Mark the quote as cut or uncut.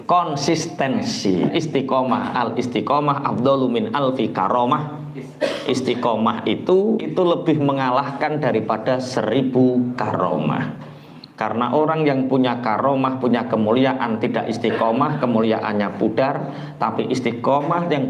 cut